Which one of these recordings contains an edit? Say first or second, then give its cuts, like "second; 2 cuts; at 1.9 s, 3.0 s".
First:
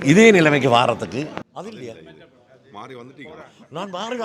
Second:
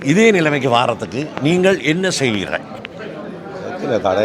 first; 1 cut; at 1.2 s